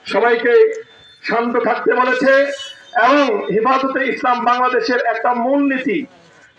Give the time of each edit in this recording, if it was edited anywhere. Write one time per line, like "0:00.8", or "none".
none